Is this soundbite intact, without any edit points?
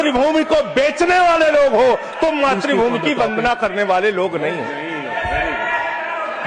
yes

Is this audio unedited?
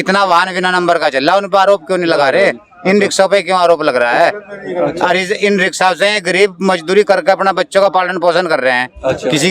yes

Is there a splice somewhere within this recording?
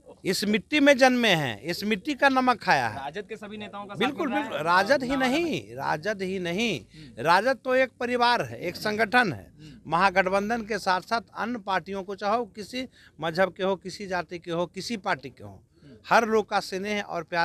no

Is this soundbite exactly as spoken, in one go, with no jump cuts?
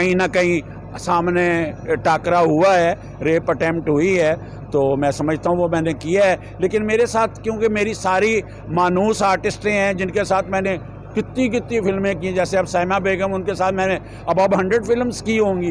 yes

